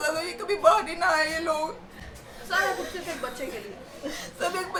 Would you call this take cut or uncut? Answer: uncut